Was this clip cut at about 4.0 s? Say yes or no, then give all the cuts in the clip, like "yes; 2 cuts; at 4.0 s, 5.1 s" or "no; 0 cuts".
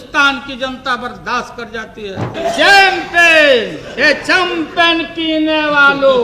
no; 1 cut; at 2.3 s